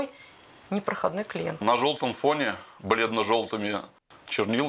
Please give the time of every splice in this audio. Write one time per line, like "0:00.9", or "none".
0:01.6